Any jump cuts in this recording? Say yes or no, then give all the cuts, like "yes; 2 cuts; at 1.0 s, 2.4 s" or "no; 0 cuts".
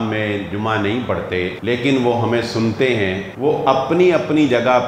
yes; 2 cuts; at 1.6 s, 3.3 s